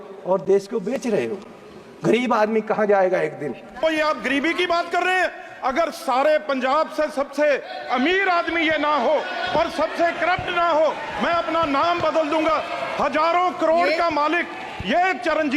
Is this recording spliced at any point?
yes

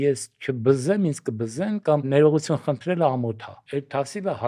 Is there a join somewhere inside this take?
yes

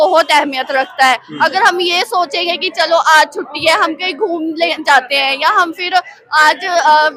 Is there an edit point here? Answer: no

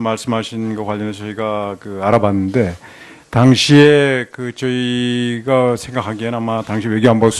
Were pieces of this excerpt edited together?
yes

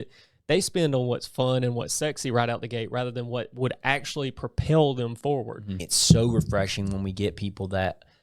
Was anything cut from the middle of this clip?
yes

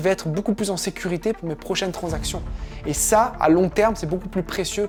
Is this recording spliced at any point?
no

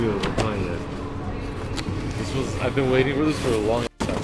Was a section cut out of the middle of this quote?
no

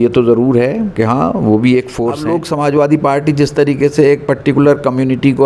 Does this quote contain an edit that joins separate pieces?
yes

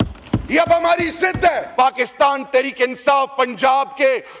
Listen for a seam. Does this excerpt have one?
yes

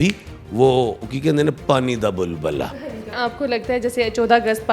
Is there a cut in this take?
yes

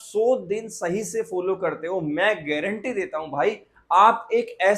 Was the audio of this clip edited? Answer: no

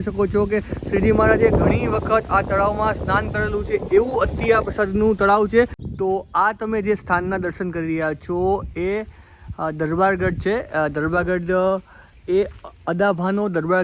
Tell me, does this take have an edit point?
yes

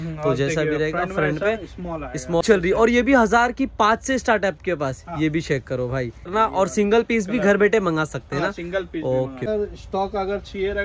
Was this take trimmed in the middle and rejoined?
yes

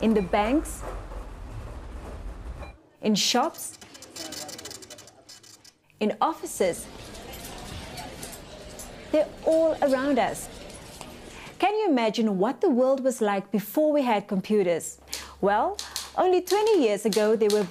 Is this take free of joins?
no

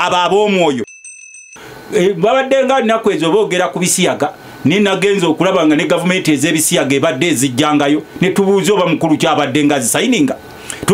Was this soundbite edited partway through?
yes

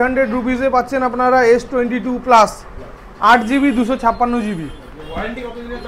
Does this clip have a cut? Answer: no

